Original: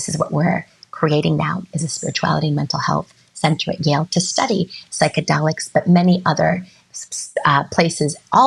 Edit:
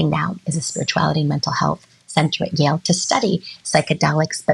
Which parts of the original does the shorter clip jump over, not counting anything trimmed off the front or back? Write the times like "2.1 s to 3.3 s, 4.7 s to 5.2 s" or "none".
none